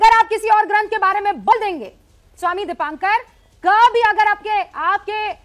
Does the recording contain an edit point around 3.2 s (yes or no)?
no